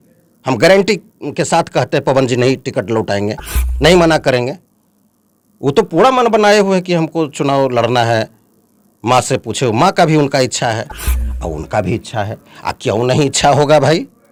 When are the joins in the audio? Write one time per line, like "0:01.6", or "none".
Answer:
none